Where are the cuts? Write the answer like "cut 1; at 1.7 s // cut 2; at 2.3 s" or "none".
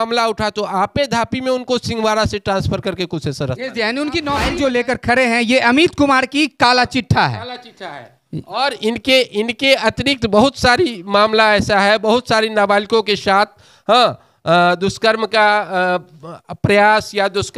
cut 1; at 4.4 s